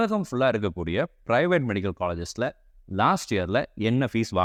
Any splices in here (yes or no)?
no